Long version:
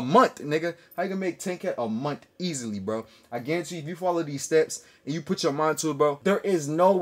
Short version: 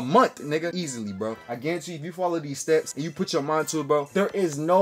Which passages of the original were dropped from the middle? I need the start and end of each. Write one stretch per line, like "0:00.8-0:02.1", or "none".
0:00.9-0:02.8
0:04.8-0:05.1